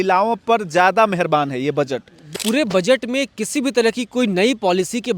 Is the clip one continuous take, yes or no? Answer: no